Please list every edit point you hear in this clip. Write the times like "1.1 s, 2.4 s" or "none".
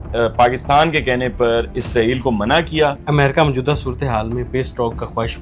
3.0 s